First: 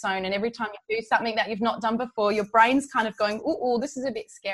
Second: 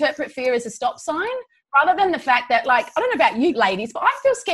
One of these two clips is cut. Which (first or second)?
second